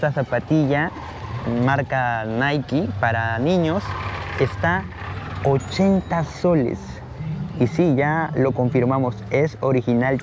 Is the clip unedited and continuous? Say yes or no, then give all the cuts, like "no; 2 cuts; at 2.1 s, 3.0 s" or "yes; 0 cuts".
yes; 0 cuts